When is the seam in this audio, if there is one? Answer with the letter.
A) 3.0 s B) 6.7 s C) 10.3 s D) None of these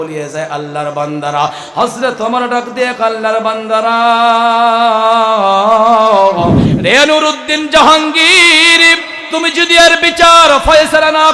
B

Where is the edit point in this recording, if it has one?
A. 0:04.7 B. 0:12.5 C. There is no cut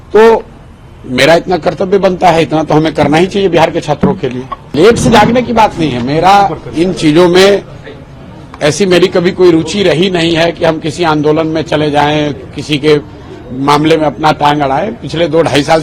A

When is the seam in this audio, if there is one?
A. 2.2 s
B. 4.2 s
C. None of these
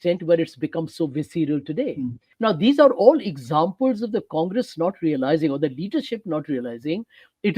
A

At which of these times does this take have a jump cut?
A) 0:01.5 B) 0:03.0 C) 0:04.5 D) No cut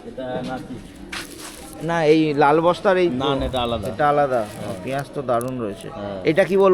D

